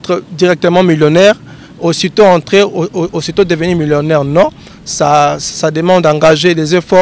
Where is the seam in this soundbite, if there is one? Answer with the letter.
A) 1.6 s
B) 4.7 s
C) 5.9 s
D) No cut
D